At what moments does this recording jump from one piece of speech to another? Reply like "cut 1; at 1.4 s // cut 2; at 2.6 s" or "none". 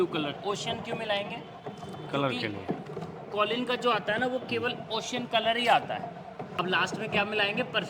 cut 1; at 6.5 s